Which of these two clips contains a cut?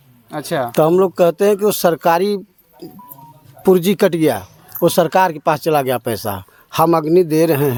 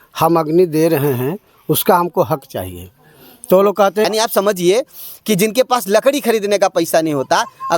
second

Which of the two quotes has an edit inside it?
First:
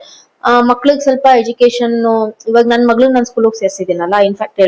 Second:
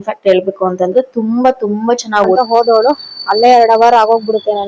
second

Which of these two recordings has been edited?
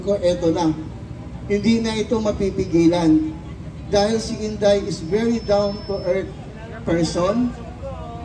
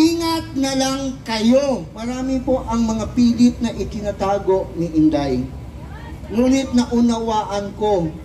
second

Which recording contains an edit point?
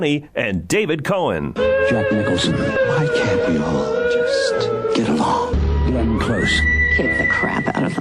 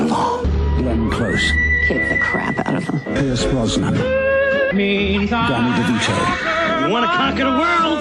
first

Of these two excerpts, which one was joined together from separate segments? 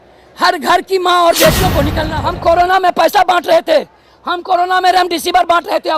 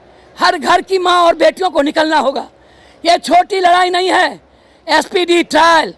first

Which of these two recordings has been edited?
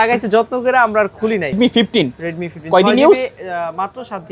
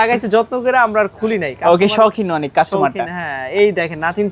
first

